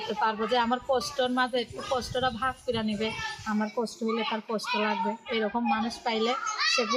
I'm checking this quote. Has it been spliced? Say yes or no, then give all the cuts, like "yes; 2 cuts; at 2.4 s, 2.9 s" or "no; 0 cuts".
no; 0 cuts